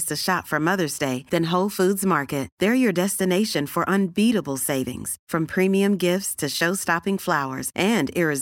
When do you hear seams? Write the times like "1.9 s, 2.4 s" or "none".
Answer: none